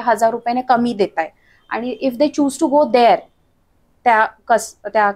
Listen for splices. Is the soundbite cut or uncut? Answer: uncut